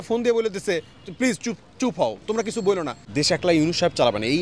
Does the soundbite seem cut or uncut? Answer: cut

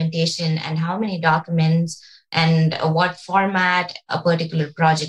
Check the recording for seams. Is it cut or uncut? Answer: cut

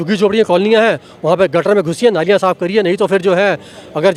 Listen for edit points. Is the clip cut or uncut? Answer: uncut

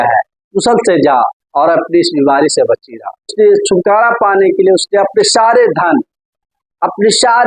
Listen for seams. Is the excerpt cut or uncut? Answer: cut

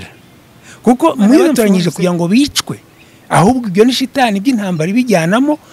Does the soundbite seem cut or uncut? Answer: cut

